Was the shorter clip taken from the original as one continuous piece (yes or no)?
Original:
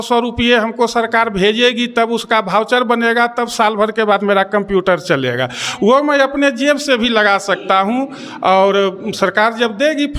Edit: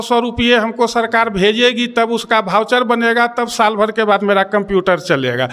yes